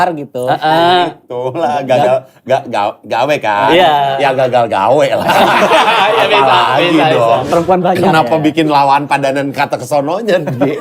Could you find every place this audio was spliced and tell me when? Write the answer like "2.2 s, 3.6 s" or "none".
7.4 s